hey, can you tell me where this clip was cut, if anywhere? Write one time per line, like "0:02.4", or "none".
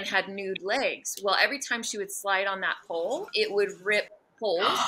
0:03.3